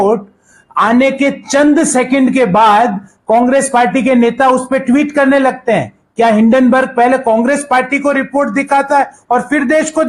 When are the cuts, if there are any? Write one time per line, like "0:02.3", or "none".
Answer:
none

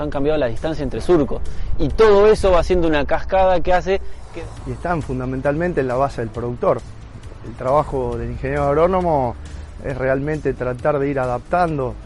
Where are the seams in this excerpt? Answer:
0:04.2

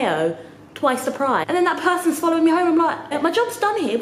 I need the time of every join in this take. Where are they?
0:01.4
0:03.1

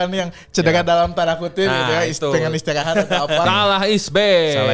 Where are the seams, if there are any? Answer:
0:03.4

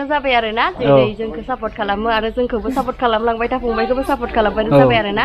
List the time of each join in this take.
none

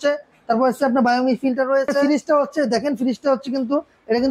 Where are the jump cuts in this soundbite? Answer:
0:02.0

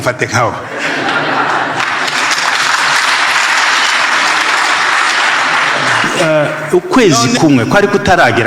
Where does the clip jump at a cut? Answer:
0:06.1

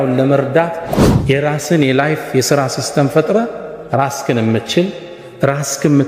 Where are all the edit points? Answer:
0:00.9

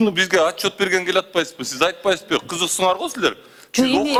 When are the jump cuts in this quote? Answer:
none

